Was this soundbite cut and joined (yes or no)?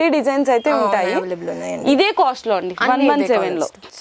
no